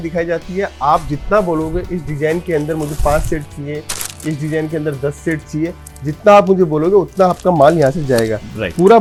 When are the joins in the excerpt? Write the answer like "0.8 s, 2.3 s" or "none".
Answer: none